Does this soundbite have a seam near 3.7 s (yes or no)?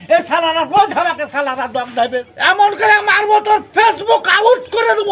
no